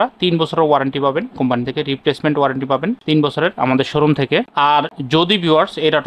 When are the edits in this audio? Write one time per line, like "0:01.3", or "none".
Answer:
none